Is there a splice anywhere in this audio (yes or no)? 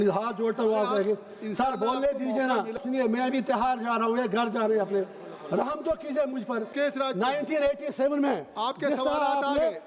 yes